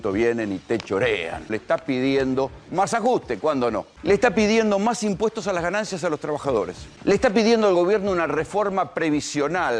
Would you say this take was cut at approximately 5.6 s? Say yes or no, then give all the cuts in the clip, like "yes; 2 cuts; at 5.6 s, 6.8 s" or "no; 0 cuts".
no; 3 cuts; at 1.6 s, 3.9 s, 6.8 s